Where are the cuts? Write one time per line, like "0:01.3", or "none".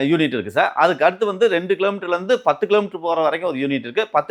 none